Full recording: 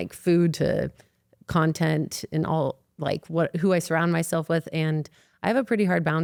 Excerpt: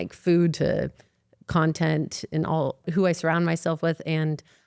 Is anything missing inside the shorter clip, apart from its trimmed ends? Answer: yes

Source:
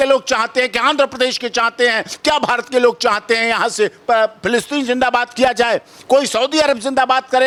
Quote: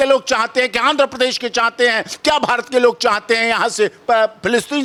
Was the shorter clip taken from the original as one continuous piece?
yes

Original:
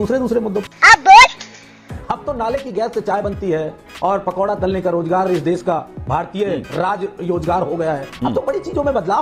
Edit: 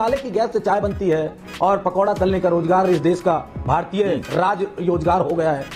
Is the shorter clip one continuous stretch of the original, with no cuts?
yes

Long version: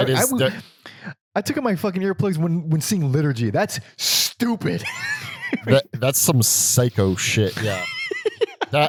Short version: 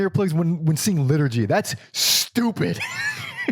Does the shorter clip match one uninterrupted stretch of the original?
yes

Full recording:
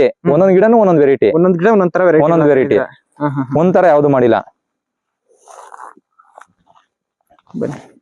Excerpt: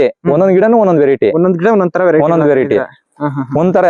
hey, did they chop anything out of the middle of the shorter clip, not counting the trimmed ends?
no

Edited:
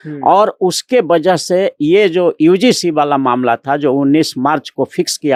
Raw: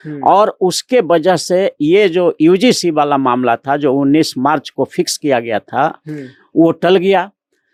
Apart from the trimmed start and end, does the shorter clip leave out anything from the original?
no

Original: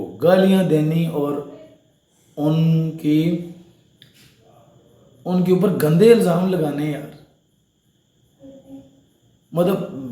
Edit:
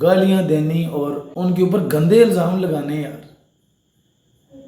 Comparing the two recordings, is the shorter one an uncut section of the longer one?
no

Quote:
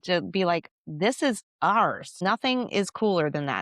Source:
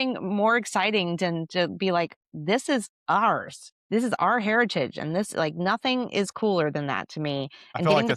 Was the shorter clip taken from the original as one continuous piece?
no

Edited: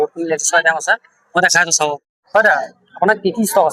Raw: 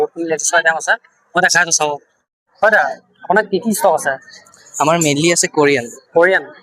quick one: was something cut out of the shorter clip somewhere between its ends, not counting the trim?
yes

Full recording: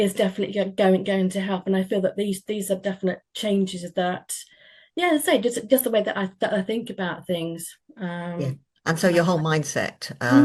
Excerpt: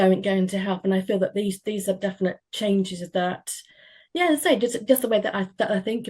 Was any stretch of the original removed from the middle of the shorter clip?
no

